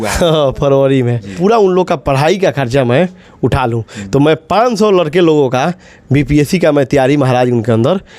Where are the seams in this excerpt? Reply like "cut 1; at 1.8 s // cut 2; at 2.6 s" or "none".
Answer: cut 1; at 1.3 s